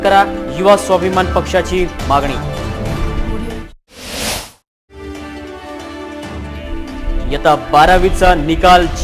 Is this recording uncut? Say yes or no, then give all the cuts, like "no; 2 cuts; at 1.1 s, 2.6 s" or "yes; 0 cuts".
yes; 0 cuts